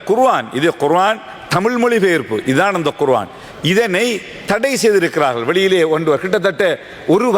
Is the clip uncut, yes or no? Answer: yes